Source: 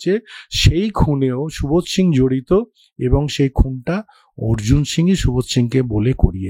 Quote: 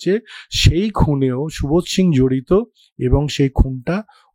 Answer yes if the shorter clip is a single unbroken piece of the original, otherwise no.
yes